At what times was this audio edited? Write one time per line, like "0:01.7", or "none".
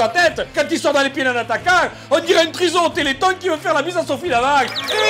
none